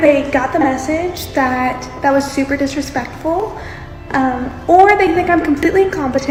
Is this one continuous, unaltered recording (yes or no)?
yes